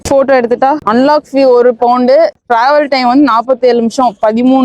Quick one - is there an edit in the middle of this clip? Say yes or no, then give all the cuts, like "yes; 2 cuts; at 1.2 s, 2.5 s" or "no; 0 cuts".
yes; 2 cuts; at 0.8 s, 2.4 s